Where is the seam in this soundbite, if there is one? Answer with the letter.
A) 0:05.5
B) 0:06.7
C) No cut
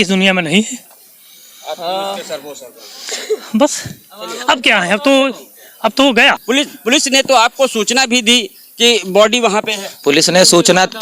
B